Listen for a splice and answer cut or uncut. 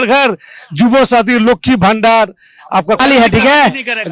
cut